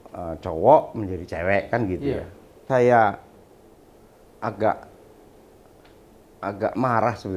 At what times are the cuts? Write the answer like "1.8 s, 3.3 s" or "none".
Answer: 2.7 s